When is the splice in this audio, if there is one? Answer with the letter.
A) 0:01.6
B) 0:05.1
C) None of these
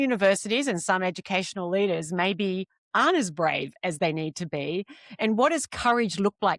C